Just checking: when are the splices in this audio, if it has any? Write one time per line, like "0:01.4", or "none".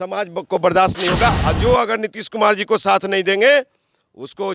0:01.4